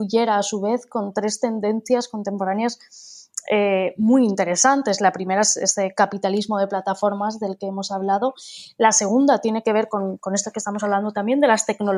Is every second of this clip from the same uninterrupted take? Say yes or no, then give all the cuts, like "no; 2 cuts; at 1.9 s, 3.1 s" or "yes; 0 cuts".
yes; 0 cuts